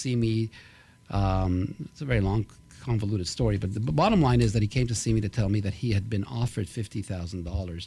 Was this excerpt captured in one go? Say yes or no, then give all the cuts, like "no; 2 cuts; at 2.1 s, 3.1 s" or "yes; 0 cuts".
yes; 0 cuts